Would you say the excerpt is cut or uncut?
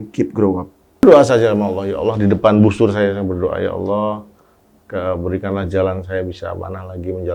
cut